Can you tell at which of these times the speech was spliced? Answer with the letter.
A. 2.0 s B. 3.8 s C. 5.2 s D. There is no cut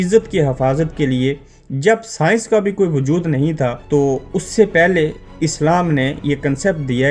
B